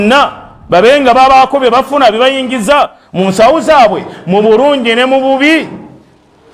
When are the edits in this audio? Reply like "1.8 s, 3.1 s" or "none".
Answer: none